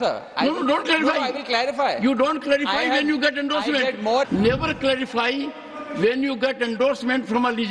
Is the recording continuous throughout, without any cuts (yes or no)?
no